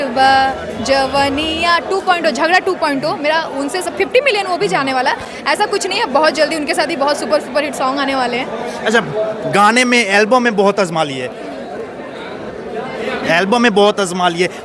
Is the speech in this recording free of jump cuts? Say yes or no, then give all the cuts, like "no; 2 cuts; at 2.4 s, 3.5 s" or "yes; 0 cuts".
yes; 0 cuts